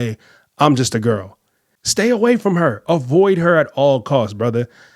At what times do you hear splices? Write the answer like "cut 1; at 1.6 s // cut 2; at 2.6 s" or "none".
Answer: none